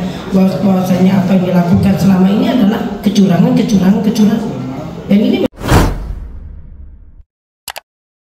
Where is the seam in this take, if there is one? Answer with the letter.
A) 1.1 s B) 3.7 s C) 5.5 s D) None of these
C